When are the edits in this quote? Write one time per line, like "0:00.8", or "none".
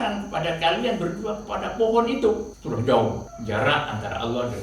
0:02.5
0:03.3